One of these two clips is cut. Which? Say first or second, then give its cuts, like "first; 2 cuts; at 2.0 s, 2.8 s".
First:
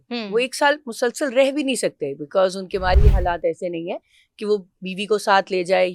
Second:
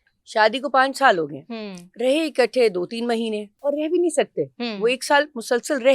second; 1 cut; at 3.5 s